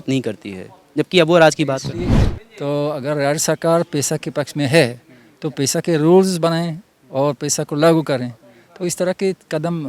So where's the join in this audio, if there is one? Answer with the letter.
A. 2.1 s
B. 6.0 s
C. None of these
A